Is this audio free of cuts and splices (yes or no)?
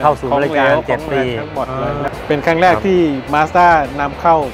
no